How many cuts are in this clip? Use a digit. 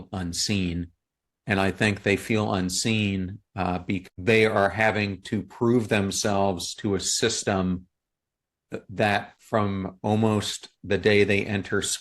2